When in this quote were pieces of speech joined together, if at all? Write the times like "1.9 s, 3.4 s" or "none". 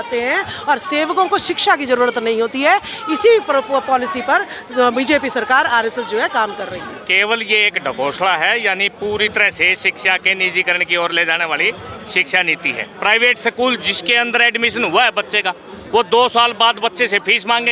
7.0 s, 12.8 s